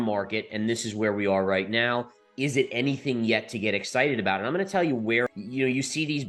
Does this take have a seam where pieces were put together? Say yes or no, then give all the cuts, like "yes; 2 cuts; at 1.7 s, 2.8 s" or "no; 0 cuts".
yes; 1 cut; at 5.3 s